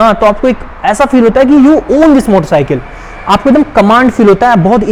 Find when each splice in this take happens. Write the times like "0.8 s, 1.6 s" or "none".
none